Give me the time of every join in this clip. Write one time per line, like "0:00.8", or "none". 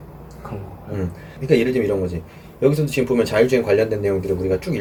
none

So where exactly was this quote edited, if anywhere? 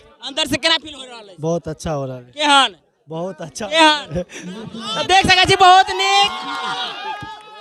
none

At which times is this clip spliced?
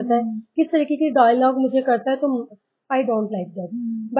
none

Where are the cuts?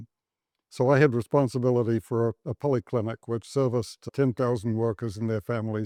none

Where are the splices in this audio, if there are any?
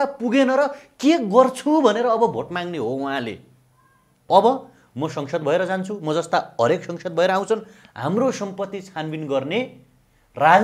0:04.2

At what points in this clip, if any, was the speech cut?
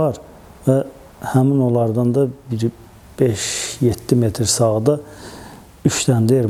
none

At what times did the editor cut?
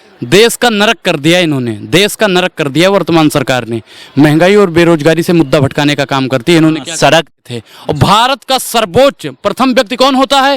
0:07.3

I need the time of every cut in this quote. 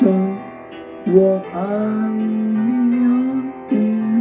none

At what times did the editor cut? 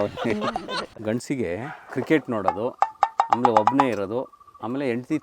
0:00.9
0:01.8

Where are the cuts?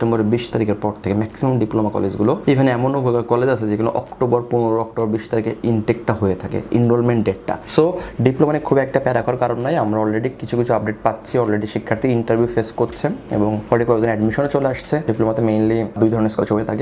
0:15.1
0:15.9

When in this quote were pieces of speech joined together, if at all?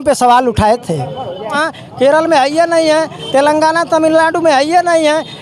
0:01.5

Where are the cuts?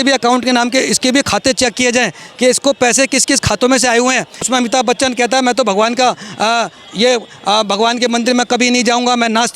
0:04.5

